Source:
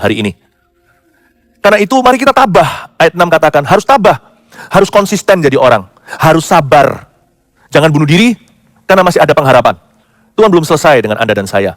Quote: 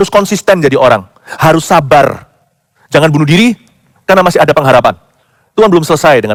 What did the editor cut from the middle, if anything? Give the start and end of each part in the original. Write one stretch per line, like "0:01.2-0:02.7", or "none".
none